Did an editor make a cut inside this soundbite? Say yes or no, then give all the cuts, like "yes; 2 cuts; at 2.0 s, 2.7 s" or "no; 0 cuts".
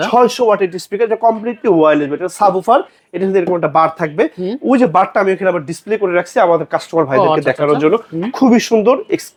no; 0 cuts